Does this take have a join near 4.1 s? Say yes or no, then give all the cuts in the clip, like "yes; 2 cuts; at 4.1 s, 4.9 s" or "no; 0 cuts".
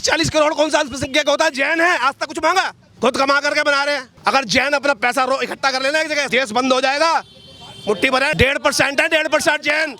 yes; 4 cuts; at 2.8 s, 4.1 s, 6.3 s, 8.3 s